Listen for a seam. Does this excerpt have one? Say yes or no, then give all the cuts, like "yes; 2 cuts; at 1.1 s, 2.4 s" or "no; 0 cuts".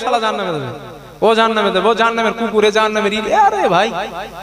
no; 0 cuts